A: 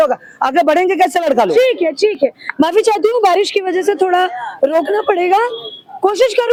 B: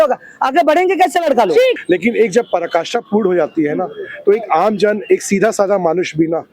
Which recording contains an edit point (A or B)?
B